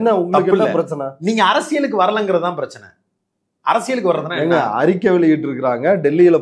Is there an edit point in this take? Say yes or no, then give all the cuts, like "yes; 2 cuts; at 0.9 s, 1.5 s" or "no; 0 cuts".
no; 0 cuts